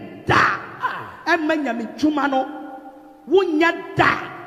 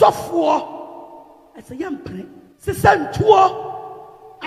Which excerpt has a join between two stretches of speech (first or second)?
second